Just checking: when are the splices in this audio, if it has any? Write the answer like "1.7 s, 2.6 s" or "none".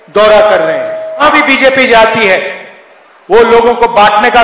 1.1 s